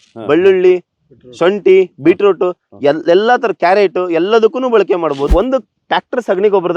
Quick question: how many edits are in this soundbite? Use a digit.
1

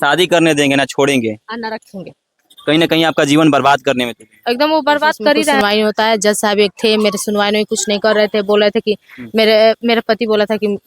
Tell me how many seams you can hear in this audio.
1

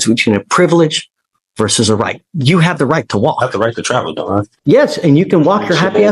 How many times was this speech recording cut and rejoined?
1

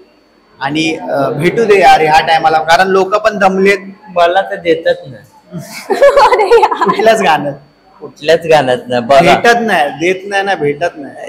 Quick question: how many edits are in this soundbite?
0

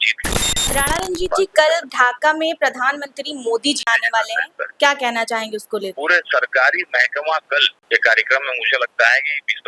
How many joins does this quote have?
4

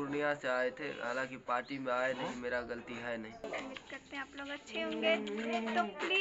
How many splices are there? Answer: 1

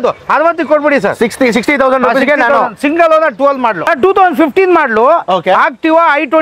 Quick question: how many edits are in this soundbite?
1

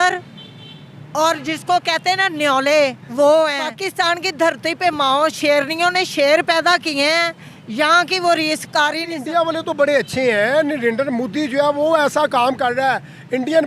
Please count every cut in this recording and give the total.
2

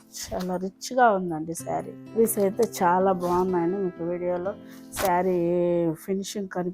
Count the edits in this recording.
1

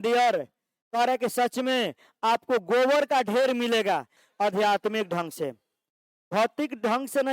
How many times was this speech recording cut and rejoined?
1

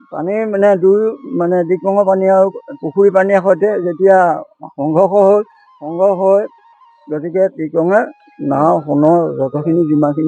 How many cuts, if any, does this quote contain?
1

